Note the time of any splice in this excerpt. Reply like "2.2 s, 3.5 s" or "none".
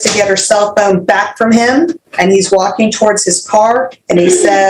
2.0 s

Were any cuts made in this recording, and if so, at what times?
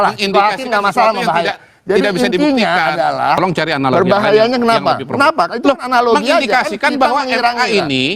3.4 s

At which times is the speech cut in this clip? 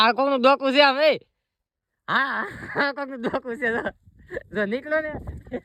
none

